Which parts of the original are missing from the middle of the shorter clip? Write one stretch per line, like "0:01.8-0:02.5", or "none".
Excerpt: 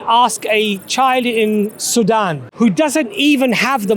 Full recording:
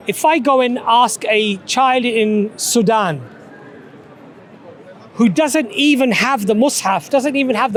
0:03.2-0:05.0